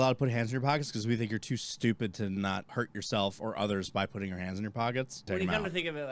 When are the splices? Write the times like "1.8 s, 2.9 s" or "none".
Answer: 2.7 s, 5.3 s